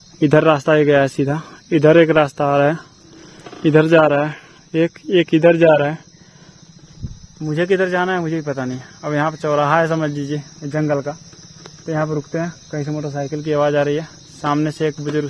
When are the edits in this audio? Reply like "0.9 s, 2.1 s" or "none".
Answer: none